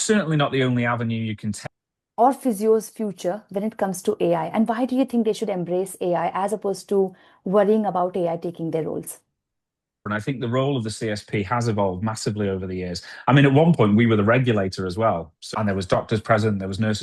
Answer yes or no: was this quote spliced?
yes